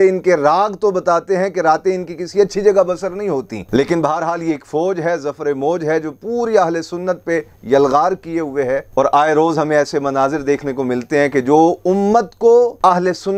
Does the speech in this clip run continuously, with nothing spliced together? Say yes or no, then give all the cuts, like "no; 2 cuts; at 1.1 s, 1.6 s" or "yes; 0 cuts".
yes; 0 cuts